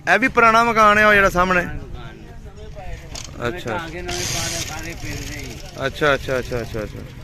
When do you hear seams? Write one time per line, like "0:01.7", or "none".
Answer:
none